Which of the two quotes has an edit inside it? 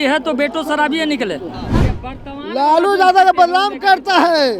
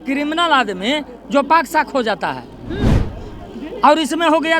first; 1 cut; at 1.6 s

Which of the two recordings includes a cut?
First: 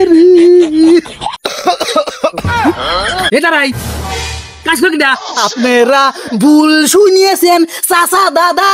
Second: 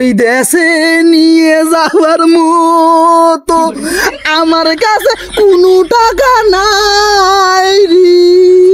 first; 1 cut; at 5.3 s

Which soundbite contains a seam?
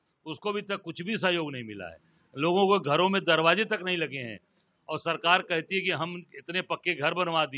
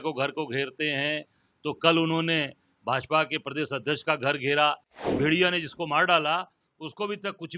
second; 1 cut; at 5.1 s

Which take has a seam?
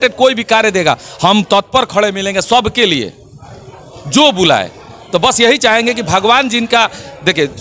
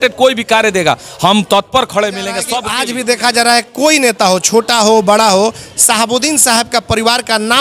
second; 1 cut; at 2.6 s

